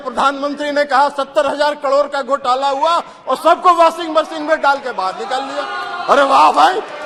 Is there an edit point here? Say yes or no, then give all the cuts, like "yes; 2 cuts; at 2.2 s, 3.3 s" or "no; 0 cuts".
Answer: no; 0 cuts